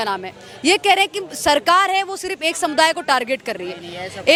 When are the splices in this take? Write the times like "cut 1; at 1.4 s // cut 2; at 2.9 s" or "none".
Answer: none